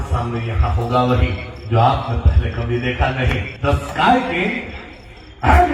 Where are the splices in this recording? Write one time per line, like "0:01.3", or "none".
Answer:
0:03.5